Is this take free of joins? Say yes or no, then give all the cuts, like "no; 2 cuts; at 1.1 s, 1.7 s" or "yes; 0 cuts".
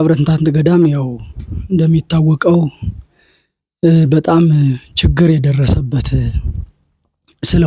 yes; 0 cuts